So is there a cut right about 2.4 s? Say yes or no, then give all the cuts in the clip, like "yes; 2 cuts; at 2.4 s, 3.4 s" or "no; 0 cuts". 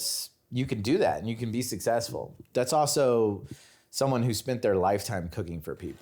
yes; 1 cut; at 2.4 s